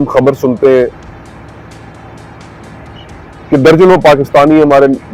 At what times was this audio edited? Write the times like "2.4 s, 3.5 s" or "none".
none

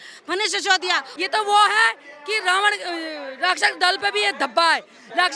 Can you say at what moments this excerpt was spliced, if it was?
1.1 s

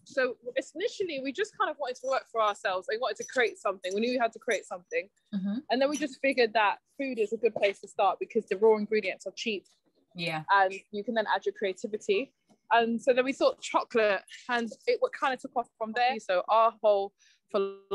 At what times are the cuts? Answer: 16.2 s

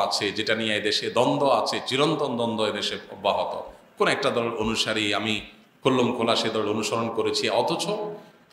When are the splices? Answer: none

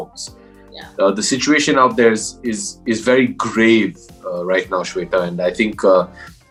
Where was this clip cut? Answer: none

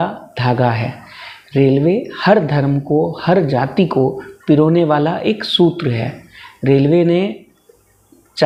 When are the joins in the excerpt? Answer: none

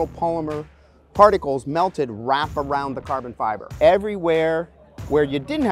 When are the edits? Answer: 3.7 s

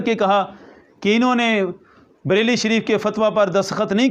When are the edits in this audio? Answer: none

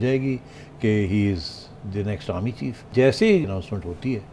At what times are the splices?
2.8 s, 3.5 s

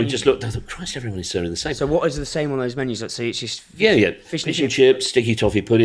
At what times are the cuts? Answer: none

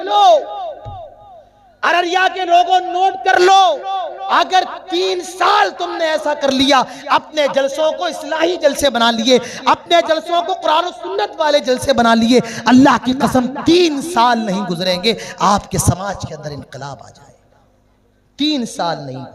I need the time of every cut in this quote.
none

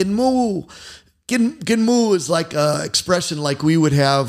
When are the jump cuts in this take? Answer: none

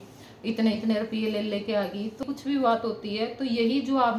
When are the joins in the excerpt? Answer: 2.2 s

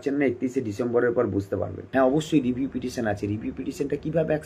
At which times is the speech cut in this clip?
1.8 s

